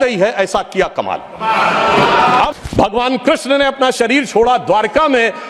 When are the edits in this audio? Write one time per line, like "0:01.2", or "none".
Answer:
0:02.5